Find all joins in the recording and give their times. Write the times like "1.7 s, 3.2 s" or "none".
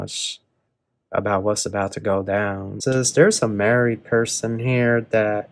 2.8 s